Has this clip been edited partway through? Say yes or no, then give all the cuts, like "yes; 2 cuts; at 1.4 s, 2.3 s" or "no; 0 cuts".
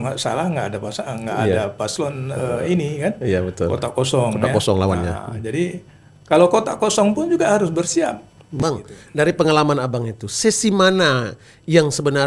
yes; 1 cut; at 8.6 s